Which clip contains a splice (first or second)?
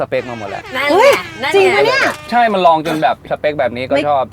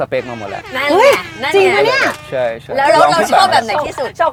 first